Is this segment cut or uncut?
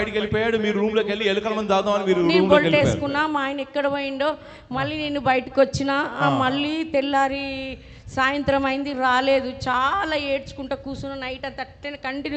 uncut